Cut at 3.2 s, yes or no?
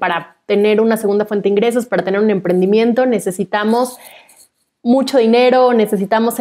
no